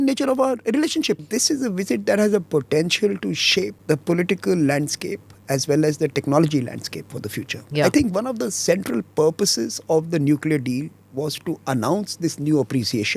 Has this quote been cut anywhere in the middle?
yes; 3 cuts; at 1.2 s, 3.8 s, 7.7 s

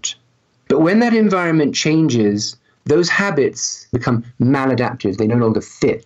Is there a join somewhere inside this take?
yes; 1 cut; at 4.0 s

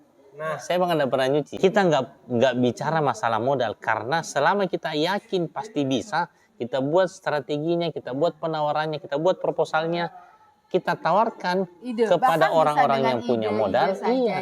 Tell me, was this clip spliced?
yes; 1 cut; at 1.5 s

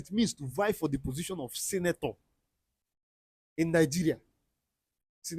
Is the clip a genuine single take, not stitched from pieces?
yes; 0 cuts

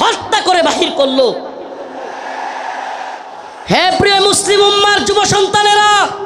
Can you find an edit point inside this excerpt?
yes; 1 cut; at 3.2 s

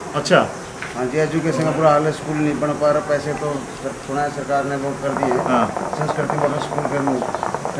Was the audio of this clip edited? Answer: no; 0 cuts

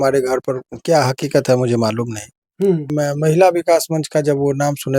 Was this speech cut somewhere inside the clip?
yes; 1 cut; at 2.9 s

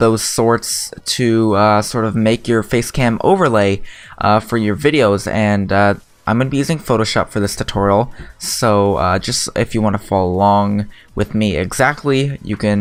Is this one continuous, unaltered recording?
yes; 0 cuts

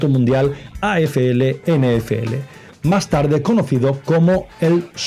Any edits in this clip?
no; 0 cuts

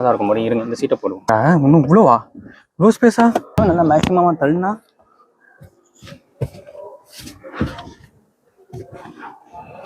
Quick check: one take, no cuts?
no; 2 cuts; at 1.3 s, 3.6 s

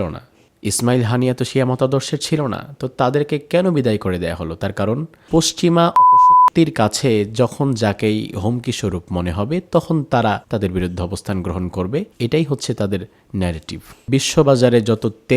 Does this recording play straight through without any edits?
no; 4 cuts; at 5.1 s, 10.4 s, 12.1 s, 14.0 s

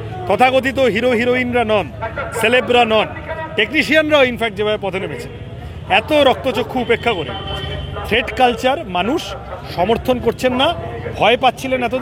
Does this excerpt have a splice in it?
no; 0 cuts

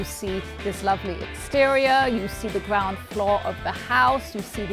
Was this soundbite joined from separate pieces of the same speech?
no; 0 cuts

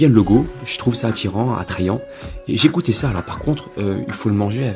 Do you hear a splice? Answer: no; 0 cuts

